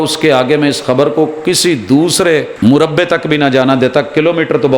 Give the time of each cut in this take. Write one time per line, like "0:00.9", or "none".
0:02.5

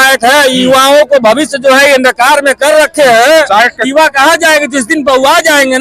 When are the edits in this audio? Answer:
none

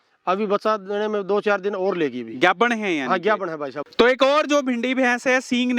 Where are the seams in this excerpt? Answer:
0:03.8

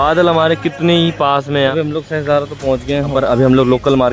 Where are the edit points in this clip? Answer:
0:01.7
0:03.1

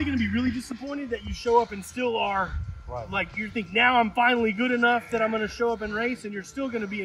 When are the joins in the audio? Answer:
none

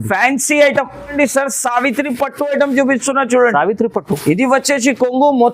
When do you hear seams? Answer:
0:01.1

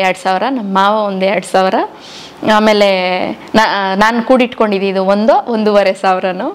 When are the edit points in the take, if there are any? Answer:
none

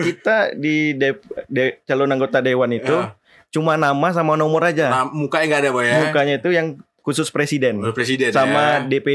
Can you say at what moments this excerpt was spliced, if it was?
none

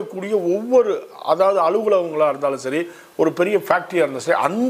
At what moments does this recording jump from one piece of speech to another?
none

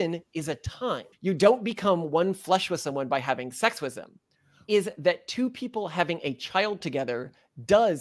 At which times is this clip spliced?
0:01.1
0:04.7

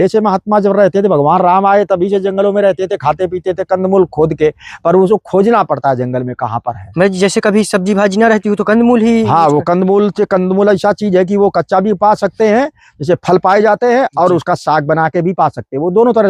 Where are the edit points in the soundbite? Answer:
none

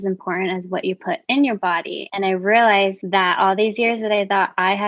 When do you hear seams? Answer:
0:02.0
0:03.0

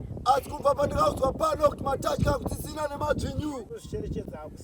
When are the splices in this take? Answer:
none

